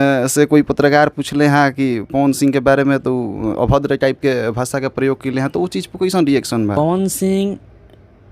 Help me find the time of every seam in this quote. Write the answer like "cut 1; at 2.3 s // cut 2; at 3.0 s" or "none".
cut 1; at 6.8 s